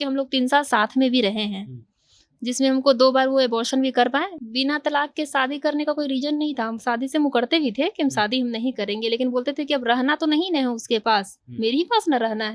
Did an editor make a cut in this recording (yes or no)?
yes